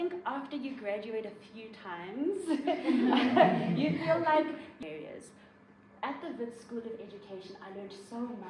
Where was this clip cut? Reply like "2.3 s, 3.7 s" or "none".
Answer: 4.7 s

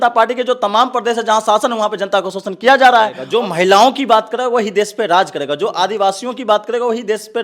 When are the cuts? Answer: 3.2 s

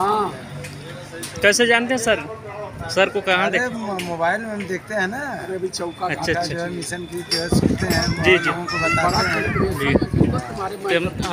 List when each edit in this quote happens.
none

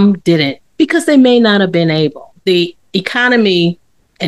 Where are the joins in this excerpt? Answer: none

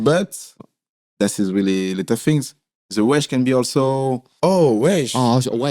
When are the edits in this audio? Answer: 4.3 s

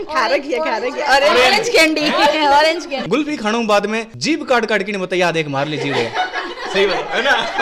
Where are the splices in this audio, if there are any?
3.0 s

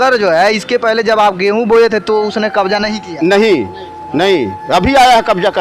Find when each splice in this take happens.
none

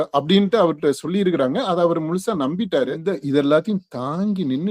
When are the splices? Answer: 3.0 s

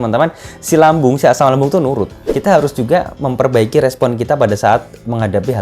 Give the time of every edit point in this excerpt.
2.2 s

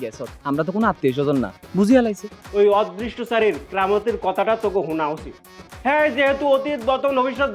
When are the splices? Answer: 2.3 s

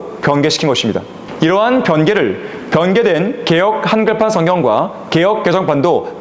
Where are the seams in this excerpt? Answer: 1.2 s

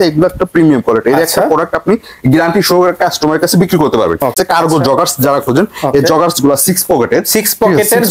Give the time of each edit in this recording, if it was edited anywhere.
4.3 s

